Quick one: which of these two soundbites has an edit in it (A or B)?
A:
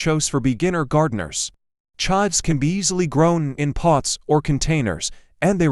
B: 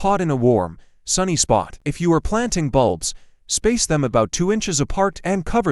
B